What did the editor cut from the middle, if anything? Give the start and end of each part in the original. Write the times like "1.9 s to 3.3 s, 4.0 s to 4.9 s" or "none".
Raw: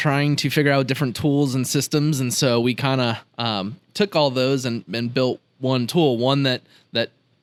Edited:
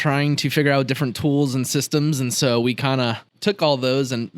3.3 s to 3.8 s